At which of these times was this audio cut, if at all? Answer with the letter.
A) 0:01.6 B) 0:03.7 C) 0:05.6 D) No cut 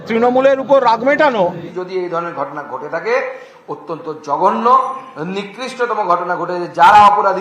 A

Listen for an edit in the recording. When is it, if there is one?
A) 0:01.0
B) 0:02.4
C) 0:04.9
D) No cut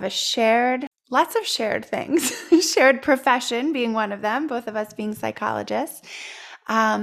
A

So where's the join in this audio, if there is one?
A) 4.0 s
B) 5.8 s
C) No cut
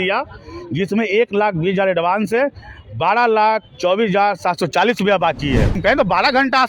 B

